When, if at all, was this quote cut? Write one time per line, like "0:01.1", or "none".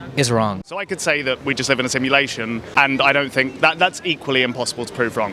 0:00.9
0:02.7

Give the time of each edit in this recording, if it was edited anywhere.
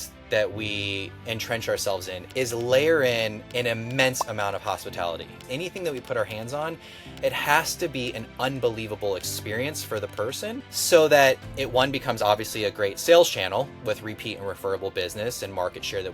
0:02.2
0:03.4
0:05.4
0:10.7

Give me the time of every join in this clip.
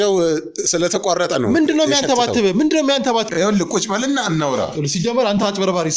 0:03.3

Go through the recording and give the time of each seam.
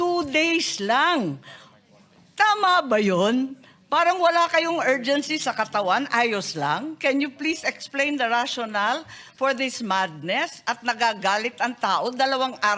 none

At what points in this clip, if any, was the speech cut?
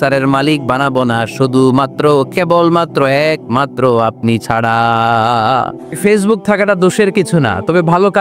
0:06.0

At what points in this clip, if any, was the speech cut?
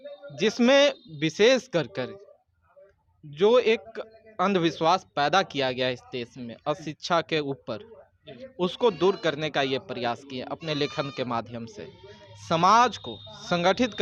none

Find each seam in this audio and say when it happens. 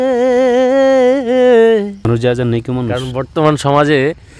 0:02.0

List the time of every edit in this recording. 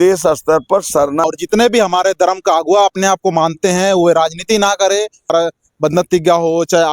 0:01.2
0:05.3

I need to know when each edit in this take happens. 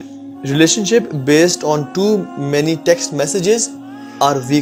none

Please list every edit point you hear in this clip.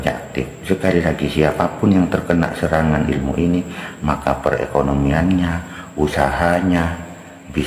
none

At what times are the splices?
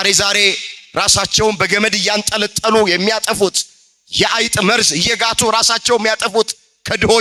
none

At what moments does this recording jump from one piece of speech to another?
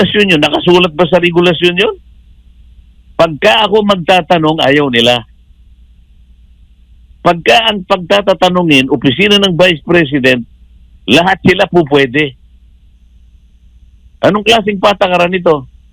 none

